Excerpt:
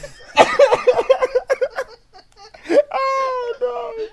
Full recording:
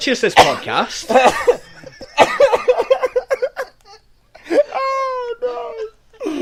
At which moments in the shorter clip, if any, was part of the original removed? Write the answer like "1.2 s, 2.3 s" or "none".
none